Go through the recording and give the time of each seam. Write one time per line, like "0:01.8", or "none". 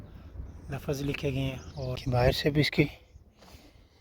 0:02.0